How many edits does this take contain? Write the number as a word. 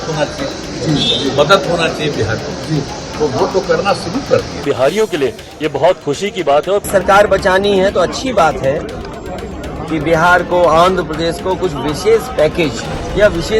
two